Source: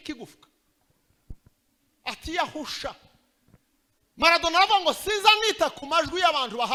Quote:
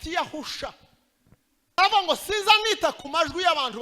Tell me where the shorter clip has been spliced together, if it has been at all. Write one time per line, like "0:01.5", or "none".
0:01.8